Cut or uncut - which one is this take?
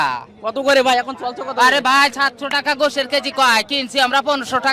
uncut